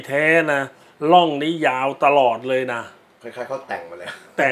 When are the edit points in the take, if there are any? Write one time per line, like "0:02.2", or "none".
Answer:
none